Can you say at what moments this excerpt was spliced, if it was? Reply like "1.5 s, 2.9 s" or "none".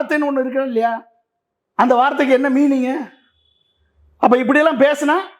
none